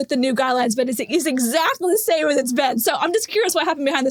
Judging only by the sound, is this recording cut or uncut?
uncut